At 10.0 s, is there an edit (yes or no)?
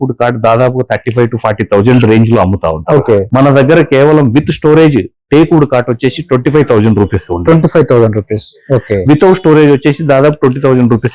no